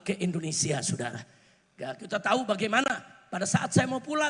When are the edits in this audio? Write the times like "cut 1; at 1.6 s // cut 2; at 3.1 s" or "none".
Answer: none